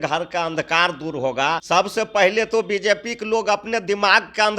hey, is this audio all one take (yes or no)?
no